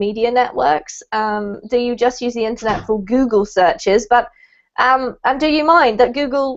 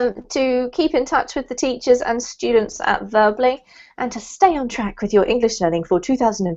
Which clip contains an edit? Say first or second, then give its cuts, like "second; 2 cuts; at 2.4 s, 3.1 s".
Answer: second; 1 cut; at 1.3 s